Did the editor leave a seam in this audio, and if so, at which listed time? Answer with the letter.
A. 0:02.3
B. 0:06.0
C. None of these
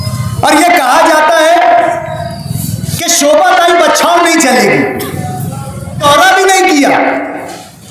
B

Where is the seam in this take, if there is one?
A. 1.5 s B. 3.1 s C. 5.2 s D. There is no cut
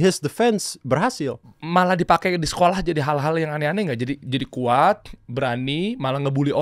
A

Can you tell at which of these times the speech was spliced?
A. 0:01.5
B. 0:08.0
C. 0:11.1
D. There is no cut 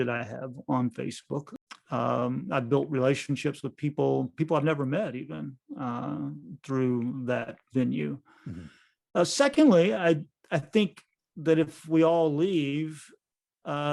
A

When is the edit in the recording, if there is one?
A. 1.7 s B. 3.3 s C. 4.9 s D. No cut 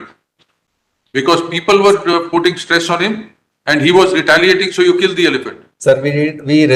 D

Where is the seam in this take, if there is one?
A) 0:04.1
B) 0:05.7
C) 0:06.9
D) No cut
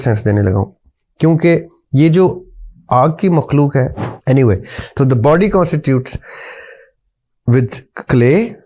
A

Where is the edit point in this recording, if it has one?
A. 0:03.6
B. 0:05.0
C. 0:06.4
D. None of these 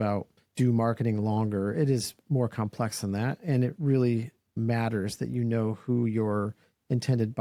D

